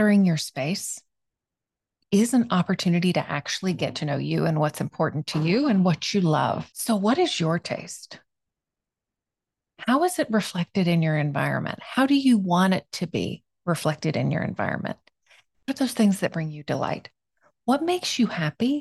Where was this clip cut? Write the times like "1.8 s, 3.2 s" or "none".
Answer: 15.7 s